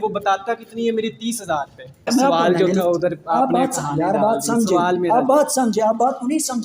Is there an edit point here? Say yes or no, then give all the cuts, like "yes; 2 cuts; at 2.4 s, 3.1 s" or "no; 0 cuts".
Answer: yes; 1 cut; at 2.1 s